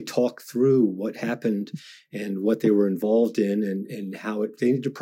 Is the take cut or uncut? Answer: uncut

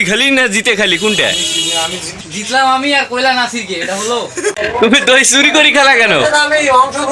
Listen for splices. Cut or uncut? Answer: cut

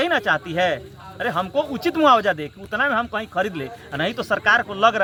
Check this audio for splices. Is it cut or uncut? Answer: uncut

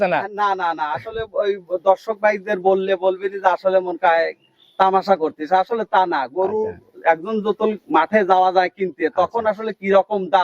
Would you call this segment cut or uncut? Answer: uncut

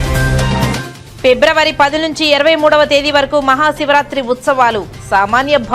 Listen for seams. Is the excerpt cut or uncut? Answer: cut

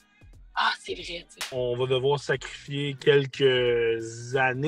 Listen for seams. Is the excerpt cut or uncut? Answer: cut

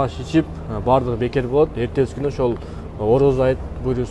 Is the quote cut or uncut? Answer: uncut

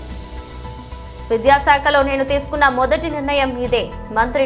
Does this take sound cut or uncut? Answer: cut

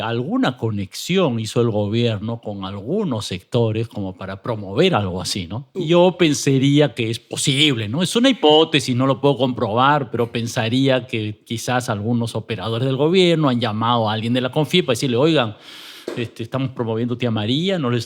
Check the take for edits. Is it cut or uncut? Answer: cut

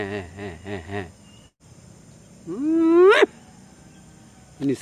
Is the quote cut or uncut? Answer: uncut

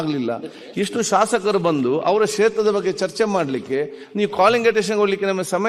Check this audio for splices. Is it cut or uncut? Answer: uncut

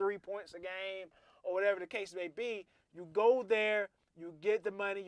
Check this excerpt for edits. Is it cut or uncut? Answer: uncut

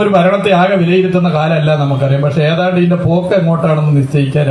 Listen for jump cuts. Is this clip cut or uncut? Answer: uncut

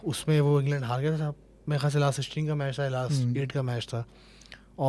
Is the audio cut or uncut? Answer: uncut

